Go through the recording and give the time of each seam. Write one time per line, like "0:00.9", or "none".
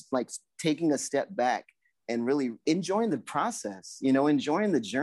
0:02.6

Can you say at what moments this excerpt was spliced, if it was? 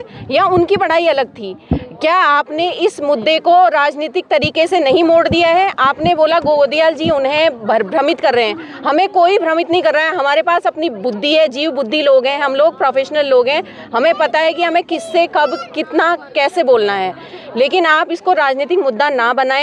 none

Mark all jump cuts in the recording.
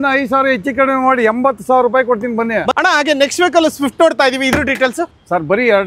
0:02.7
0:05.0

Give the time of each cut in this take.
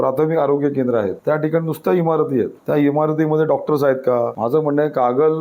0:01.2
0:02.6
0:04.3

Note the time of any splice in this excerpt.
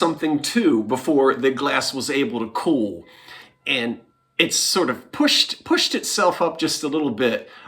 none

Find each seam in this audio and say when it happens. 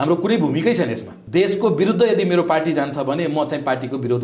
0:01.1

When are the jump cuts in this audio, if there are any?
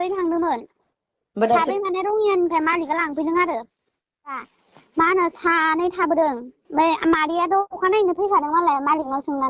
0:04.4

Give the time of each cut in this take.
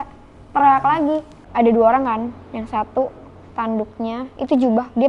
0:01.4

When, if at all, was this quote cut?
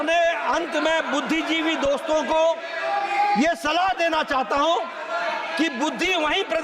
none

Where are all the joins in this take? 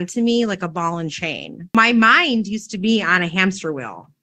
0:01.7

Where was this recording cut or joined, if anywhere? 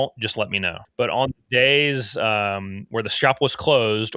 0:01.0
0:02.8

